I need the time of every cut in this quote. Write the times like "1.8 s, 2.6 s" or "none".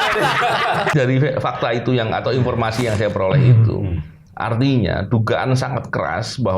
0.9 s